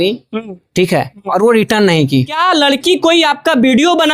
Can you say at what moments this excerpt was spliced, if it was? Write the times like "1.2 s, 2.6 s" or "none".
2.3 s